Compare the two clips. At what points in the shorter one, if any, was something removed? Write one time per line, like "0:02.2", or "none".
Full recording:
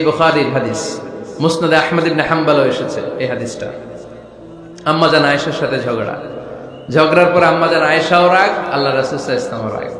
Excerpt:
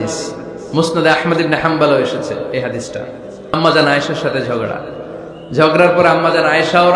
0:03.5